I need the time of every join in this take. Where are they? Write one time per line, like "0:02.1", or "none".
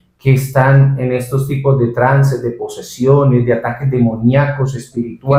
none